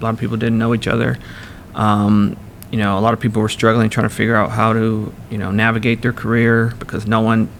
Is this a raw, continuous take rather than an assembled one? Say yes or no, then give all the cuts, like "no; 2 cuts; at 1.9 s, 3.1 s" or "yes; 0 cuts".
yes; 0 cuts